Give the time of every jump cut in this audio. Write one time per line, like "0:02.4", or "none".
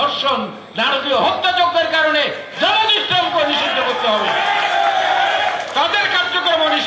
none